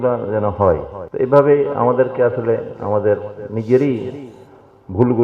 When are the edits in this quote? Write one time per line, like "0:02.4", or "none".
0:01.0